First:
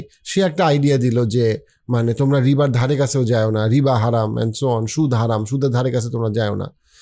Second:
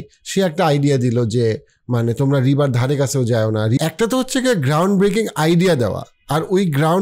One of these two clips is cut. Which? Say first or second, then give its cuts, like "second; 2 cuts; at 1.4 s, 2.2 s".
second; 1 cut; at 3.8 s